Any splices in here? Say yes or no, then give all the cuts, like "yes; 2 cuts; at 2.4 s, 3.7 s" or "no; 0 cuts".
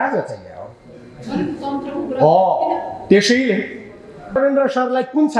yes; 1 cut; at 4.3 s